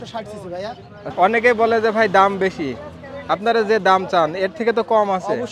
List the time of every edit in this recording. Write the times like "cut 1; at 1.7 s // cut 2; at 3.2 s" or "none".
cut 1; at 1.1 s